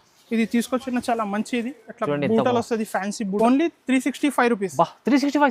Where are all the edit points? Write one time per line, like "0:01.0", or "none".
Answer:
0:03.4